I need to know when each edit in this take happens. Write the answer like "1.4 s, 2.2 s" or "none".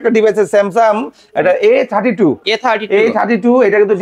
none